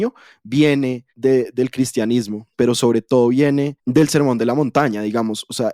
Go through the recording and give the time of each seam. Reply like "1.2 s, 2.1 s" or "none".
1.1 s, 2.5 s, 3.8 s